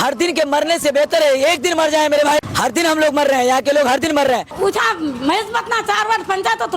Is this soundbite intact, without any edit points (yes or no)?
no